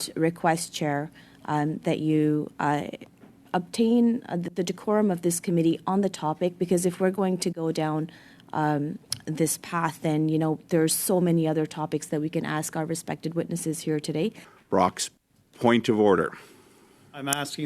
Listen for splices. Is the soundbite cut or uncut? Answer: cut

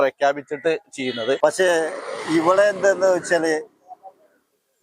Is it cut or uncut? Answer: cut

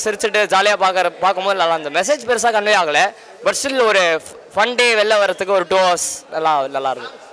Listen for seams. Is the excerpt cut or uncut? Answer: uncut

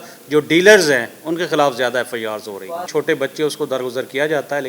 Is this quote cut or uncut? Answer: cut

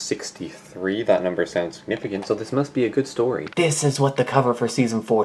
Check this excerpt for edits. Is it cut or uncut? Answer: cut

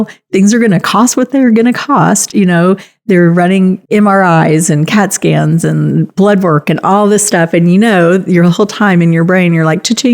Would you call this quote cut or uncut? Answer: uncut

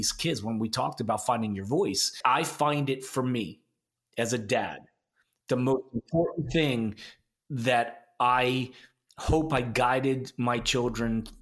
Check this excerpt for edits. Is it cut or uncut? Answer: cut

